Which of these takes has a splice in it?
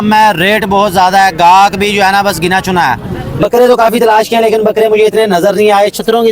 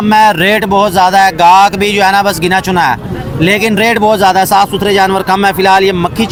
first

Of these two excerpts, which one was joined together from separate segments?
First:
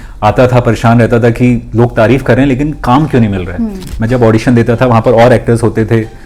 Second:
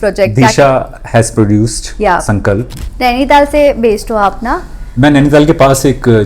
second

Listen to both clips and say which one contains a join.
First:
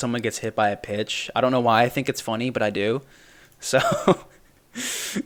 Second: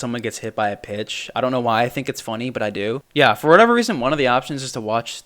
second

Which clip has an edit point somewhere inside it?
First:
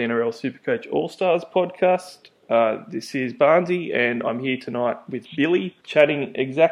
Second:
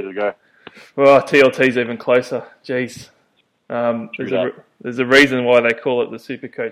first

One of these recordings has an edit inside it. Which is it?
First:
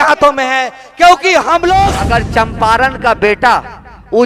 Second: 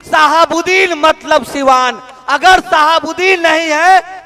first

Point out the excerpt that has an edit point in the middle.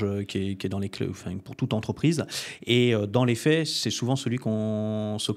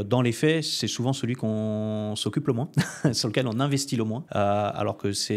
second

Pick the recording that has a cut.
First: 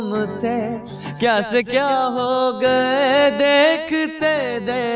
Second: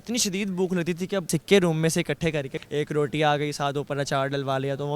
second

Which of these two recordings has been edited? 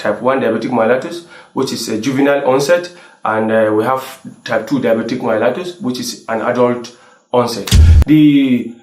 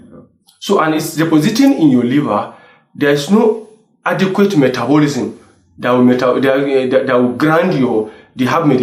first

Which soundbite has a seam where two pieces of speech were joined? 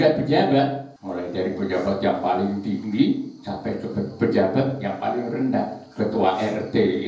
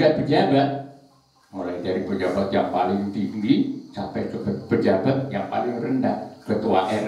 first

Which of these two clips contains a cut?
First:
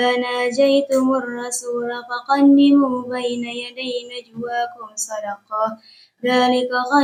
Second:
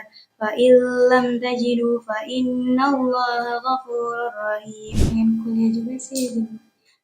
second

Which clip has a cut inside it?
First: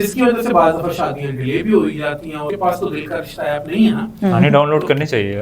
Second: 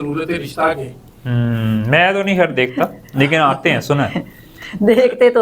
first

